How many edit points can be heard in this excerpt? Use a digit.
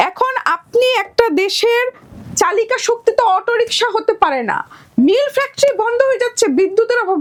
0